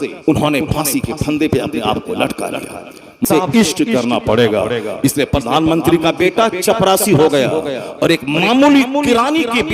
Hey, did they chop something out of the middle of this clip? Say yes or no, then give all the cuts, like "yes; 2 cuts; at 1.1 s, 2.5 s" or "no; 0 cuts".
yes; 1 cut; at 3.2 s